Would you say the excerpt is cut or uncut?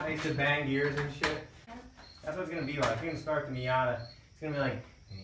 cut